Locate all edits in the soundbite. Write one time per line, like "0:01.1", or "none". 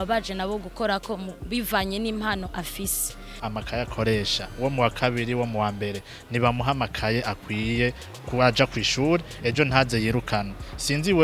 0:03.4